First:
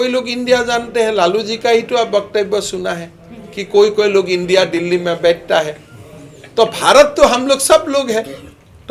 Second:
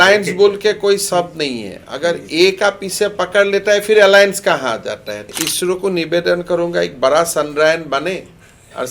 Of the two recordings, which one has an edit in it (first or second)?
second